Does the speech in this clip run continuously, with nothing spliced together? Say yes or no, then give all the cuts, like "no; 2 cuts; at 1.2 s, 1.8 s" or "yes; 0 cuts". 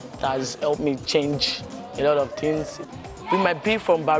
no; 1 cut; at 2.9 s